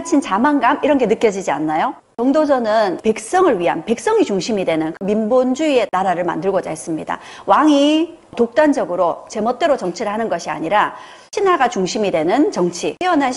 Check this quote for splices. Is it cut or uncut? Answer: cut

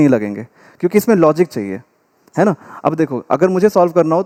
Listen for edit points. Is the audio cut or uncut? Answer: uncut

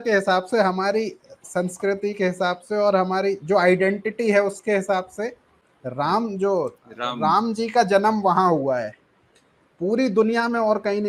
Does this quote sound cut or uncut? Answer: uncut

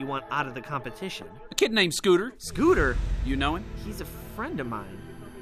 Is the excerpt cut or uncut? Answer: uncut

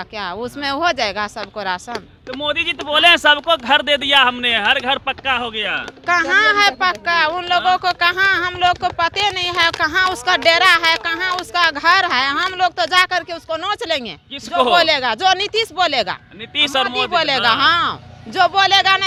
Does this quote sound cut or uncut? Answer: uncut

